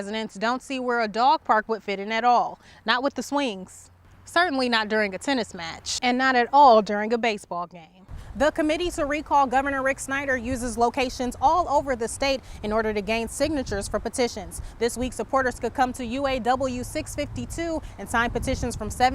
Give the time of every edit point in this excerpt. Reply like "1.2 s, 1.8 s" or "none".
7.5 s